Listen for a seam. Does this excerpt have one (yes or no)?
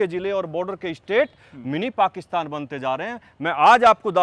no